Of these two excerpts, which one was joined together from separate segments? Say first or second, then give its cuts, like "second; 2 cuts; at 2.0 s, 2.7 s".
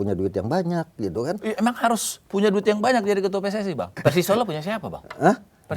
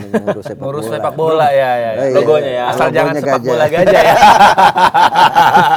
first; 1 cut; at 3.9 s